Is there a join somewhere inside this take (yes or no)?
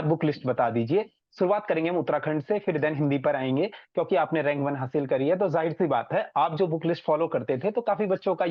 no